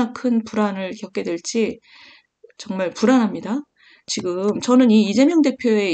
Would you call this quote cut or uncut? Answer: cut